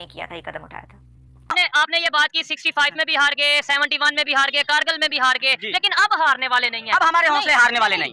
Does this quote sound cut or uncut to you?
cut